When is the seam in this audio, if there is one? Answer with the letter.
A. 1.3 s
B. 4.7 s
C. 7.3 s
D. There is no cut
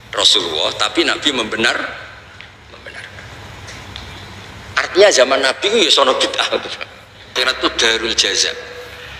C